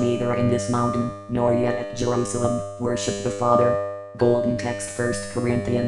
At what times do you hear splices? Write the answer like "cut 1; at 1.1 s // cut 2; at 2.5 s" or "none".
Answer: cut 1; at 4.0 s // cut 2; at 4.8 s